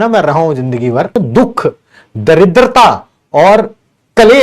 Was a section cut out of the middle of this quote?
yes; 1 cut; at 1.2 s

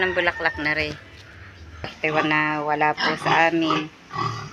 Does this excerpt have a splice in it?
yes; 1 cut; at 1.9 s

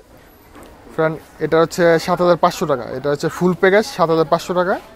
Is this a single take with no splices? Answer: yes; 0 cuts

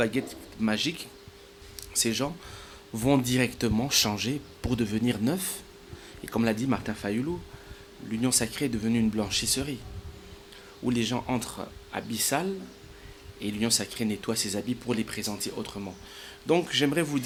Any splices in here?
no; 0 cuts

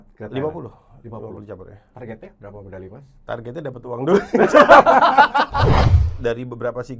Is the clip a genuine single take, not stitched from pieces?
no; 1 cut; at 6.0 s

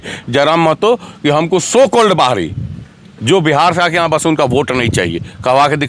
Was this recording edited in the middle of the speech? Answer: no; 0 cuts

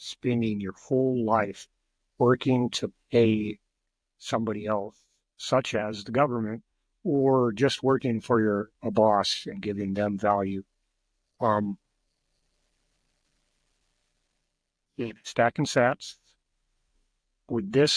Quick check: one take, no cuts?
yes; 0 cuts

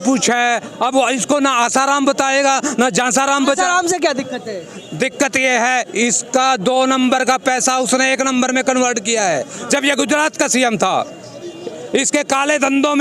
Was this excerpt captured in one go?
yes; 0 cuts

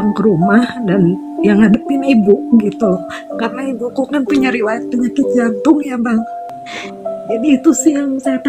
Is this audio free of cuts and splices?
no; 1 cut; at 6.4 s

